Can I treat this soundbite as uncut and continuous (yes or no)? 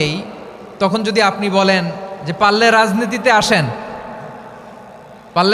yes